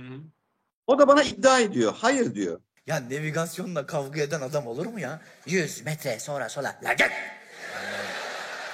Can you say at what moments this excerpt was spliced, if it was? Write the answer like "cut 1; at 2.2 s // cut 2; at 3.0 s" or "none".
cut 1; at 2.8 s